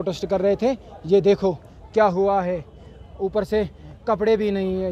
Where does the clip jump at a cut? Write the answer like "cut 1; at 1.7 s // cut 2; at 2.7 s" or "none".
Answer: none

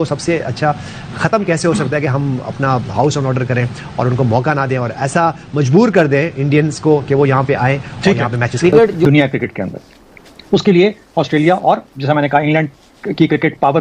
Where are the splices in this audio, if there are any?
cut 1; at 9.0 s

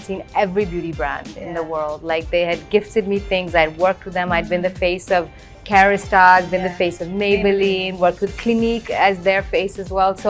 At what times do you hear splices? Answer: none

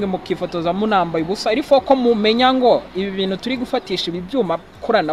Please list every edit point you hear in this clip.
none

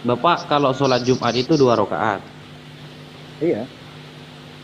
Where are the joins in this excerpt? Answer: none

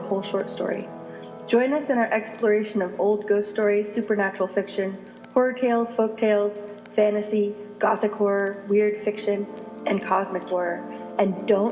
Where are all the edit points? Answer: none

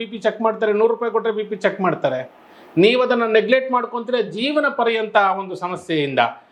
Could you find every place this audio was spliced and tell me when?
none

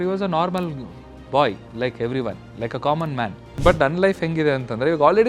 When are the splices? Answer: cut 1; at 3.5 s

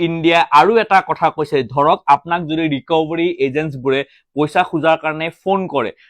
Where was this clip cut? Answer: none

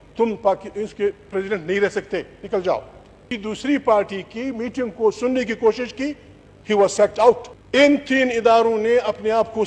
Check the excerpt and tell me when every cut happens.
cut 1; at 3.2 s // cut 2; at 7.5 s

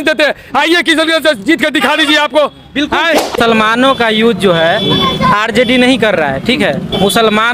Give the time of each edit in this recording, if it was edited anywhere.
cut 1; at 3.4 s

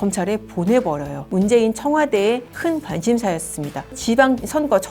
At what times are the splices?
cut 1; at 1.3 s

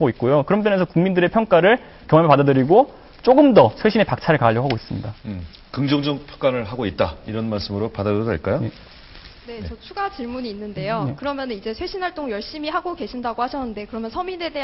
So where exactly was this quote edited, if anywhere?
none

